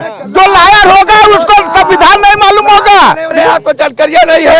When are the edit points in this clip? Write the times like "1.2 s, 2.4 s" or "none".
3.3 s